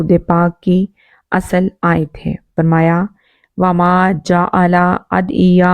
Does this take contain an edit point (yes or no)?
yes